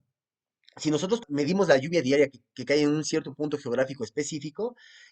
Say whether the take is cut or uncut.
cut